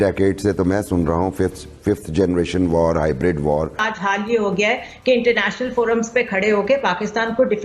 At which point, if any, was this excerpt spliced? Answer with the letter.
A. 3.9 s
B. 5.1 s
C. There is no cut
A